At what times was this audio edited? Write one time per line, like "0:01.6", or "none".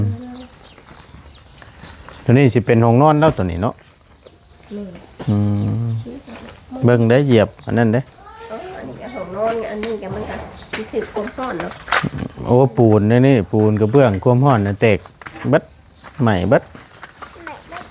none